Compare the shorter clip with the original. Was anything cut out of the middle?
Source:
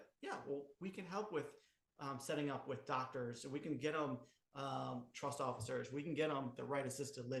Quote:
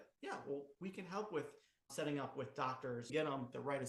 yes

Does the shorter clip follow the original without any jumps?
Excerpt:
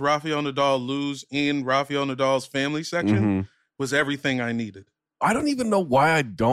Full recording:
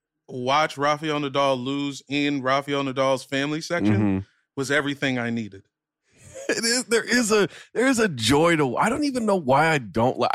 no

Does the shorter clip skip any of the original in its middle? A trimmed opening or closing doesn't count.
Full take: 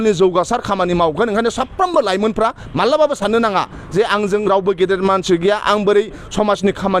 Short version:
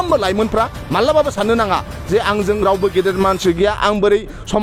no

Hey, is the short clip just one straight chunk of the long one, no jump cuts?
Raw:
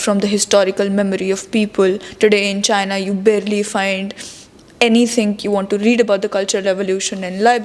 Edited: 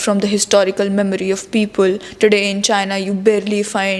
yes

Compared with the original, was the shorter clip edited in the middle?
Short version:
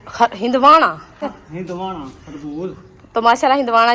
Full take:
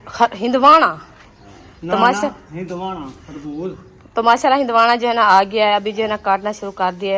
yes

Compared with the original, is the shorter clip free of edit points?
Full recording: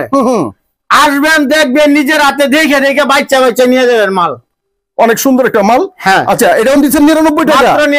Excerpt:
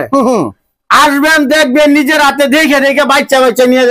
yes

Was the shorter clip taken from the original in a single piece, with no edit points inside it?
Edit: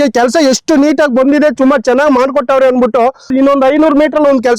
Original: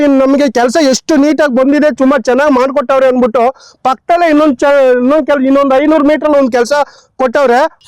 no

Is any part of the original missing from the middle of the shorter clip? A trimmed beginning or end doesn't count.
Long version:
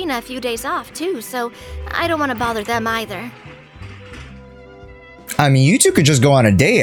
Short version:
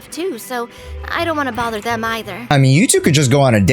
yes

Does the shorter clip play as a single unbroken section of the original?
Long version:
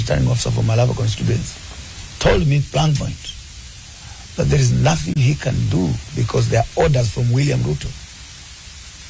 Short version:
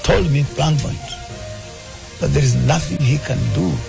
yes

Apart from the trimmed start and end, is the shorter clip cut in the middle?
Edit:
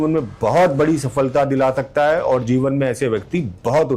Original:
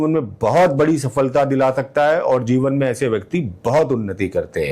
no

